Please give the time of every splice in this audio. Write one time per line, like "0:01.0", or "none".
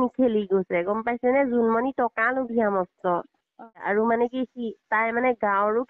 0:03.8